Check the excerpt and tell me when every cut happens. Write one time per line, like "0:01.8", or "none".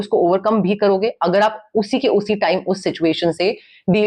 none